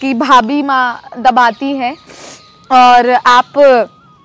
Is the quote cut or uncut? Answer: uncut